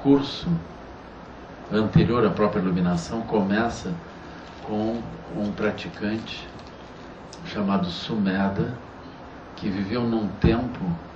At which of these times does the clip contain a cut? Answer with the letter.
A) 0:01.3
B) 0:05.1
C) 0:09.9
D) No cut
B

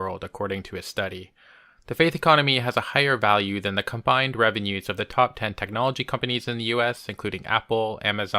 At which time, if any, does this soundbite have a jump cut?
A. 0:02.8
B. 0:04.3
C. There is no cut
B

